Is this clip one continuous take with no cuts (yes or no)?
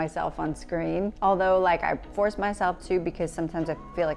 no